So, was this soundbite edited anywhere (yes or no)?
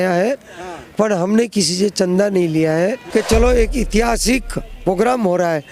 yes